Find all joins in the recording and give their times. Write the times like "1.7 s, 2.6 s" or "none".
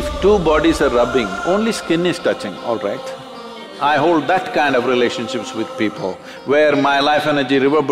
3.7 s

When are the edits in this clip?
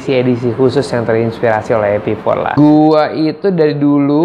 2.5 s

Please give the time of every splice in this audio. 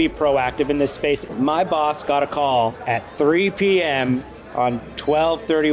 1.3 s, 2.8 s

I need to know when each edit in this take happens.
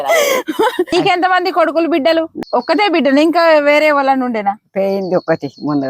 0.9 s, 2.4 s

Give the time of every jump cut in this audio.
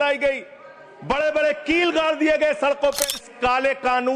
3.2 s

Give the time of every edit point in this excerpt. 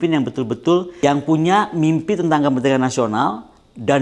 1.0 s

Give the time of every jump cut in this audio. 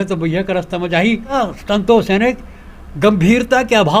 1.3 s

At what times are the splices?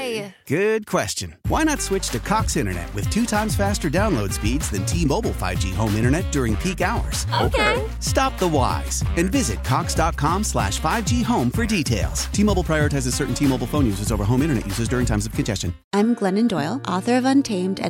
15.7 s

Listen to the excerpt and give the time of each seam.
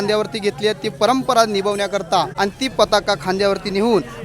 2.3 s

